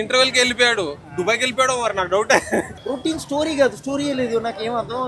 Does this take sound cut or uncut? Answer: cut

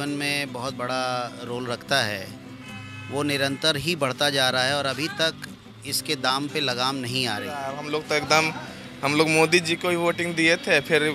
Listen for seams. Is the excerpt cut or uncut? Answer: cut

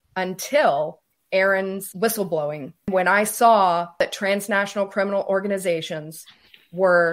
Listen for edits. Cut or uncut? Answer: cut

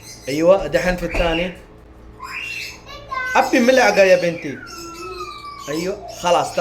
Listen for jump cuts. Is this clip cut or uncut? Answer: uncut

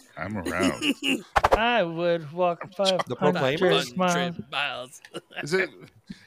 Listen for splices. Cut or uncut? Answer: cut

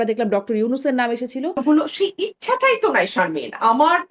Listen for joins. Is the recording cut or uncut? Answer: cut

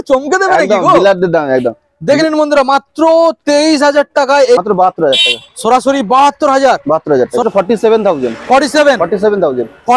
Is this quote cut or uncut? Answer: cut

